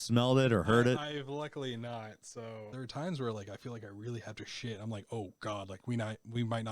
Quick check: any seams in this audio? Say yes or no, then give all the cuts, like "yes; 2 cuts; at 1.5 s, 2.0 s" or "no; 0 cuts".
yes; 1 cut; at 2.7 s